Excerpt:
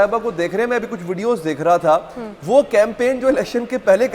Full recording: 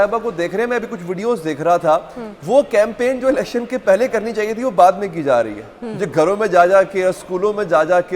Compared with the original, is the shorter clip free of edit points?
yes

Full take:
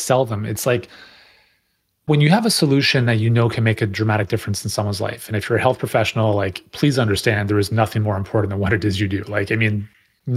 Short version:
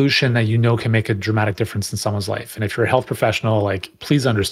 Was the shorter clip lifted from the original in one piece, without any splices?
yes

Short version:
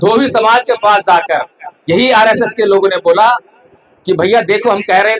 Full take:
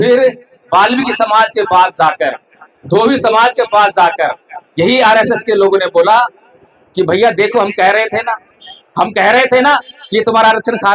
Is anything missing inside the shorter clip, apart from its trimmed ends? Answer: no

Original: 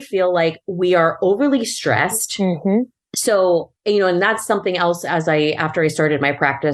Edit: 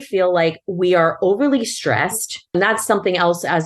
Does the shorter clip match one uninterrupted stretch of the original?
no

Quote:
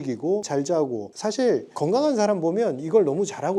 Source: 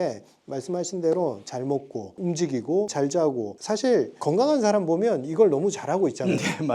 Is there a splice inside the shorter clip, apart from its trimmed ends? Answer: no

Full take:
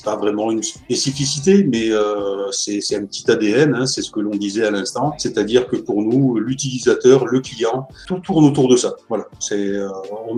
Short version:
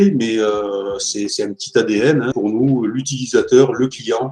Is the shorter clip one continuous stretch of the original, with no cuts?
no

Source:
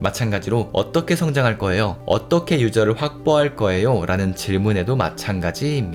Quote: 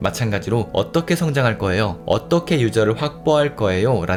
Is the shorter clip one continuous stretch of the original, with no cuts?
yes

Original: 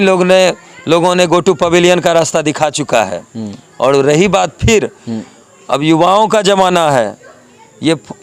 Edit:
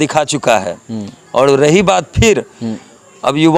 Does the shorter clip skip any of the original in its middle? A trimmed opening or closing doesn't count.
no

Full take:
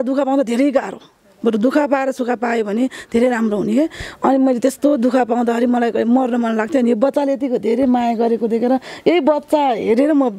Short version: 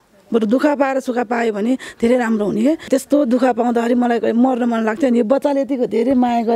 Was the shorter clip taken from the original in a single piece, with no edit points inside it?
no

